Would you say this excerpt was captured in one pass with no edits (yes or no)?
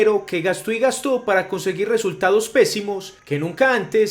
yes